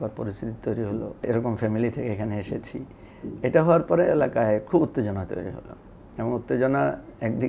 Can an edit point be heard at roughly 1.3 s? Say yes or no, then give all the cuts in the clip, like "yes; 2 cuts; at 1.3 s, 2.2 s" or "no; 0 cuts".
yes; 1 cut; at 1.3 s